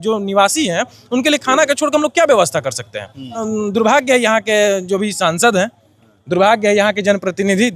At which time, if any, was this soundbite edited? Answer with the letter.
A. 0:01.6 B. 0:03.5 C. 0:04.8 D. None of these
B